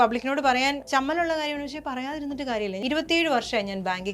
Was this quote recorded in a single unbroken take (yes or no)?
no